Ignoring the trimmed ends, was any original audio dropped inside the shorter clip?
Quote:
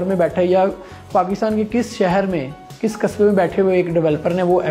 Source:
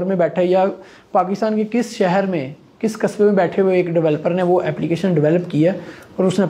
no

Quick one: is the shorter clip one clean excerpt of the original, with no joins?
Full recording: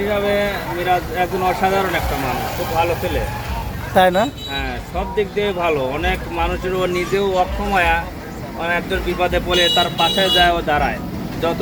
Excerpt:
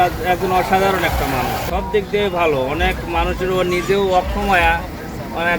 no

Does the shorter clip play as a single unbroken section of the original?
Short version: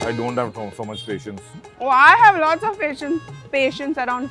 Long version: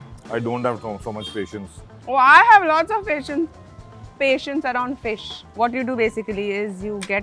no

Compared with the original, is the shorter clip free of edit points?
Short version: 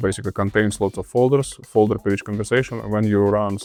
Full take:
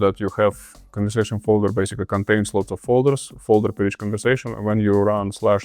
yes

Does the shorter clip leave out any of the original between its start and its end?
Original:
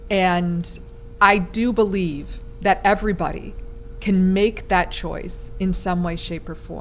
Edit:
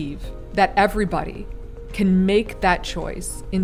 no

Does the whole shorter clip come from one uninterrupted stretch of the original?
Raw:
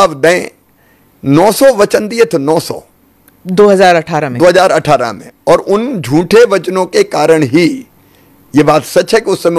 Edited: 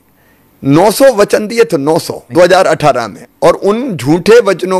no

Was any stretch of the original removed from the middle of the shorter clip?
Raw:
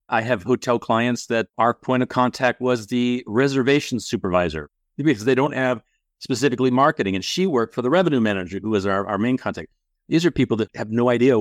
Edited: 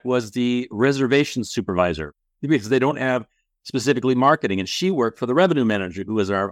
no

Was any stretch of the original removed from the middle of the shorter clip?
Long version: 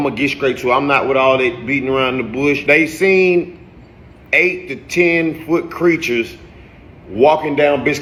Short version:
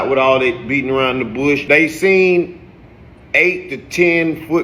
no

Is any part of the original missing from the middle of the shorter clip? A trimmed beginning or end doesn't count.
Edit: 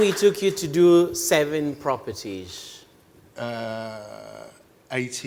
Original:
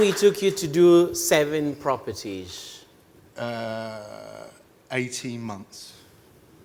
no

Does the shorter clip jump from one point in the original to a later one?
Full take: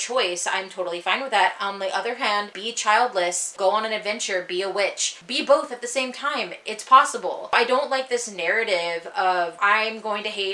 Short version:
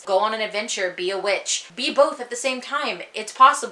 no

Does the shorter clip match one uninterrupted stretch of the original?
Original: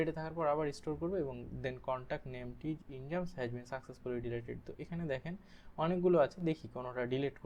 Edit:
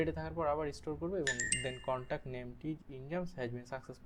yes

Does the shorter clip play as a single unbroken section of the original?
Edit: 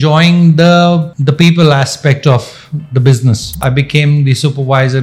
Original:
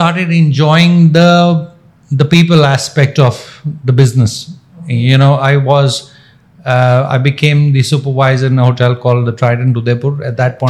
no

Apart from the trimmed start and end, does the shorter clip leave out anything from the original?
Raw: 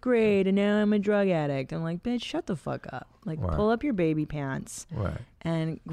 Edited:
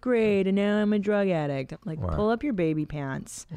yes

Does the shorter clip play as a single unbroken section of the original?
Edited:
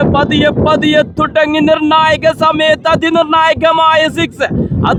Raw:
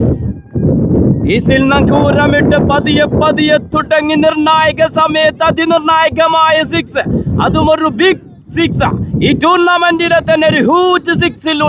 yes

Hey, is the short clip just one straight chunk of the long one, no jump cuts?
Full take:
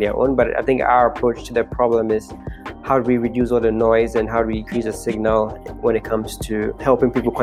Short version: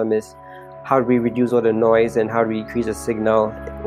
yes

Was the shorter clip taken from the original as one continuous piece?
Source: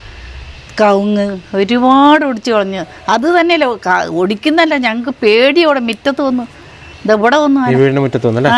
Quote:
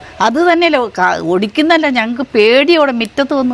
yes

